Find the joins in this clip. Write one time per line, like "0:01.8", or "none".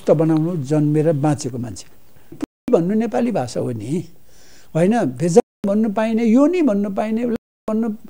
0:02.6